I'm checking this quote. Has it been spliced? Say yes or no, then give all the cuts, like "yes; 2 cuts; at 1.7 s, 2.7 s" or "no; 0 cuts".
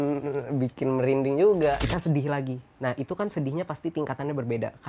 yes; 1 cut; at 1.8 s